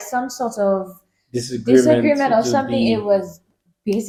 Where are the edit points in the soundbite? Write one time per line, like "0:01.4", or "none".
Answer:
none